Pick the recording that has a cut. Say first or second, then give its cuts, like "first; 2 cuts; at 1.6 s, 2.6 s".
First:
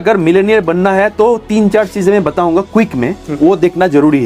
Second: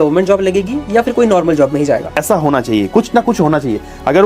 second; 1 cut; at 2.2 s